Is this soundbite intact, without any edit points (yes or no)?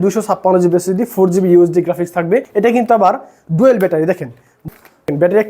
no